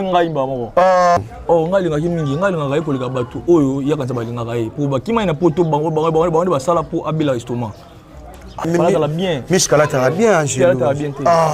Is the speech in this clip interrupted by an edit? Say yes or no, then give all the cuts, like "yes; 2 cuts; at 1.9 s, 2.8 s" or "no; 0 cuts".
yes; 2 cuts; at 1.2 s, 8.6 s